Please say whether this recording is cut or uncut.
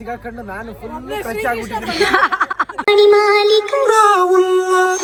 uncut